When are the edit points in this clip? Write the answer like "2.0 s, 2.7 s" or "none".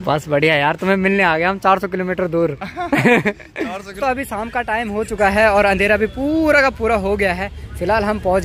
3.9 s